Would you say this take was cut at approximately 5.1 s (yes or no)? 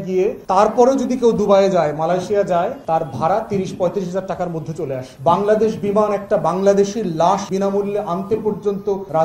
yes